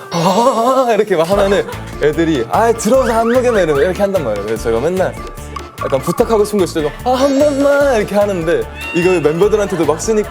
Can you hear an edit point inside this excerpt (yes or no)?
yes